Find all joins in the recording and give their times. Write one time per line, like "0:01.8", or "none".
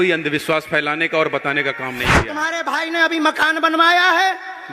0:02.3